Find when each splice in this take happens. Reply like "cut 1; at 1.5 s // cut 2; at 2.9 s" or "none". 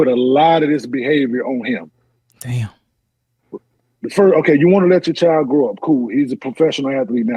none